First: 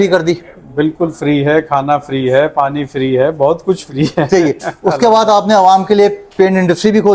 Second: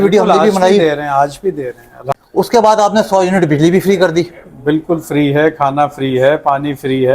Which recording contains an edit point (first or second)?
second